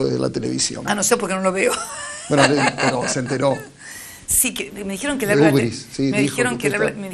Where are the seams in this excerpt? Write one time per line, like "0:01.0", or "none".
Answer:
none